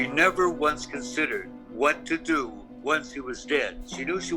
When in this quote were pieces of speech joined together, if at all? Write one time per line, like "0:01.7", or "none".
none